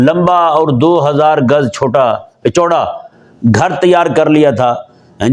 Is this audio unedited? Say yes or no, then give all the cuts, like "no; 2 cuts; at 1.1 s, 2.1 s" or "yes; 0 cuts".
yes; 0 cuts